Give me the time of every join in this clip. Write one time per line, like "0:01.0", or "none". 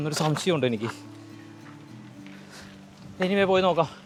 none